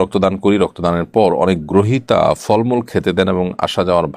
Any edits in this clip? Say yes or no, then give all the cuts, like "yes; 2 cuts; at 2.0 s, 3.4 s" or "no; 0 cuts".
no; 0 cuts